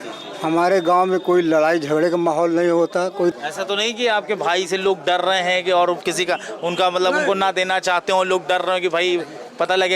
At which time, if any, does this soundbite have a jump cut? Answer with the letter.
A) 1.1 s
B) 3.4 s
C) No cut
B